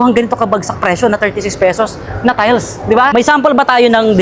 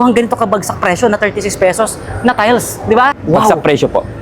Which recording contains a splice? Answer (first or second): second